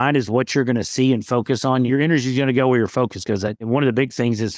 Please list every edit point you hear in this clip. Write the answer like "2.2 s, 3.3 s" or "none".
1.9 s, 3.7 s